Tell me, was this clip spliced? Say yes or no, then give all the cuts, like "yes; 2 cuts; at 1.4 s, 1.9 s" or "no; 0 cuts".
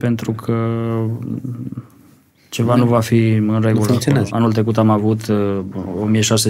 yes; 1 cut; at 4.3 s